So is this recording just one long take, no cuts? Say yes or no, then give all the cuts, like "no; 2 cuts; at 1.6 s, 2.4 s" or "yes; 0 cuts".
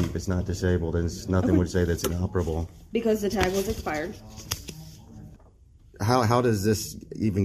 no; 1 cut; at 5.4 s